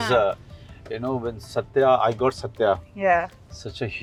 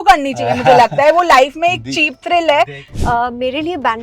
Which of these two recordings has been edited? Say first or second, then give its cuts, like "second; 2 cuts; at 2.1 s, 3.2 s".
second; 1 cut; at 2.7 s